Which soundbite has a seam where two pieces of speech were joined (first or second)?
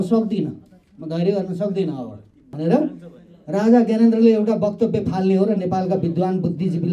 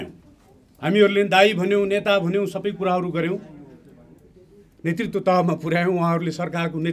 first